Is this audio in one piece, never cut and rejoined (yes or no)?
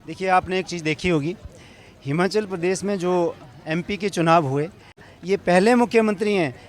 no